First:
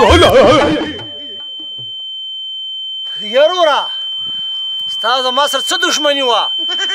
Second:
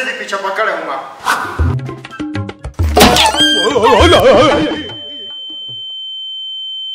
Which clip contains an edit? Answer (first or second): second